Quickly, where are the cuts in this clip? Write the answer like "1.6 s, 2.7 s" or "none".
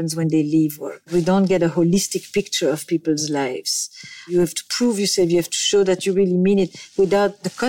1.1 s, 4.3 s